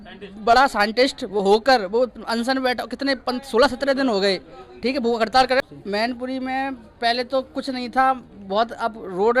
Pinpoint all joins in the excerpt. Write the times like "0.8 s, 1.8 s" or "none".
5.6 s